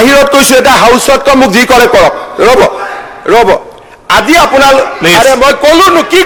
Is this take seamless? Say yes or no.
yes